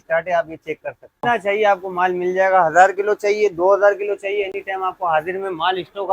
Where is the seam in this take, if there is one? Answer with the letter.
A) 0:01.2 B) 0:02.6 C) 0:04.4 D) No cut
A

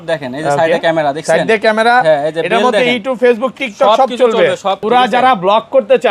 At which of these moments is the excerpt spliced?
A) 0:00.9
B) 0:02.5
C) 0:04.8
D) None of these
C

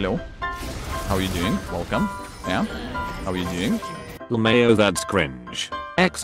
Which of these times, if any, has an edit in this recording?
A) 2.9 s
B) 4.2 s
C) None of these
B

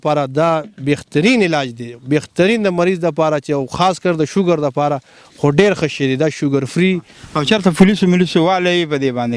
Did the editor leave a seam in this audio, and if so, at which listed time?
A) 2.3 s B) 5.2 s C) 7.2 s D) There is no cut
C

